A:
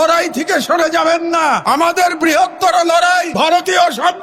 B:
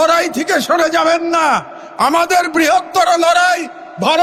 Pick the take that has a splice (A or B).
A